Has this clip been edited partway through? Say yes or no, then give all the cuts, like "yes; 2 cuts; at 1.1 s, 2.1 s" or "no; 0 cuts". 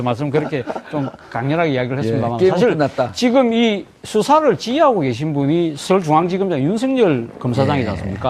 yes; 1 cut; at 1.4 s